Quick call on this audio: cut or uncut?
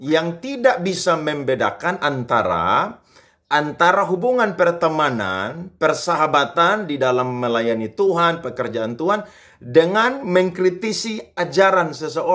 uncut